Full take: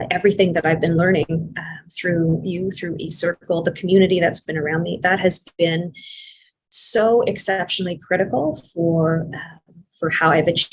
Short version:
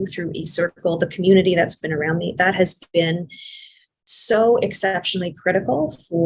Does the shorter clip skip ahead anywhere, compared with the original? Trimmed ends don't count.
no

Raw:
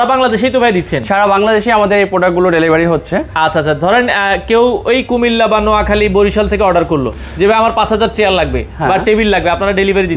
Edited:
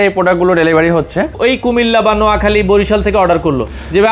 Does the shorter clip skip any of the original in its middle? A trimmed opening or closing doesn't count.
yes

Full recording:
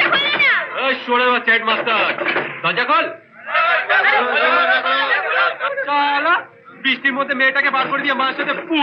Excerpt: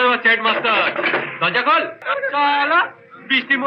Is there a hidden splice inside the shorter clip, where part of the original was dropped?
yes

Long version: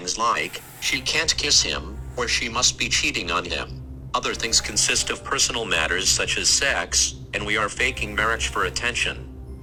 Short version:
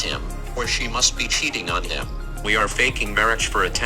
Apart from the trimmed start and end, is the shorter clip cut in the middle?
yes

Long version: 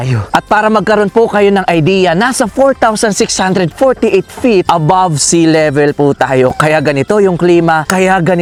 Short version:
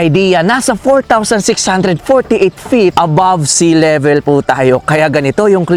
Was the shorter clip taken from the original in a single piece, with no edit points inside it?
yes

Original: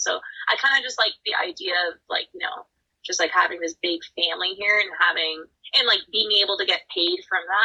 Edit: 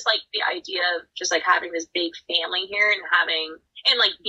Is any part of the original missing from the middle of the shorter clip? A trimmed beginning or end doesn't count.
yes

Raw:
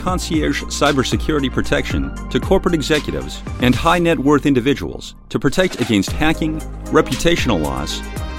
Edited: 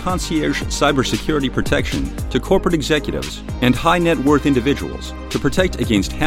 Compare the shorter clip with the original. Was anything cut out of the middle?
no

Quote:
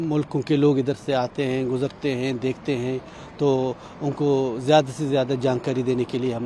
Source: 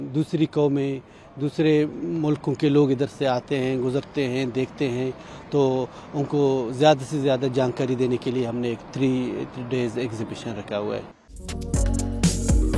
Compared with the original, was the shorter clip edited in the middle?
no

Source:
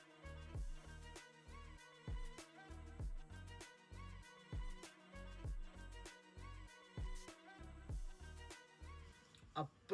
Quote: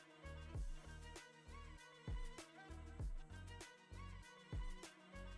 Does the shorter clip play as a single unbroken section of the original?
yes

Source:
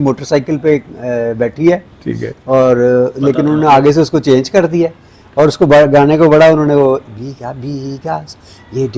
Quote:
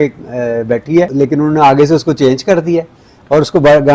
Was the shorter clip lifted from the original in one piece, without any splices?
no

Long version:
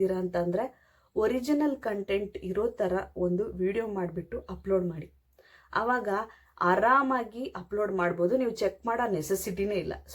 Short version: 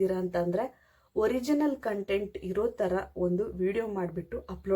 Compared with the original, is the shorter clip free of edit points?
yes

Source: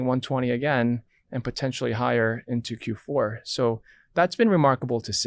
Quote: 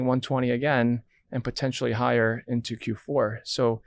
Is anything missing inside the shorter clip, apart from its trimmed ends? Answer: no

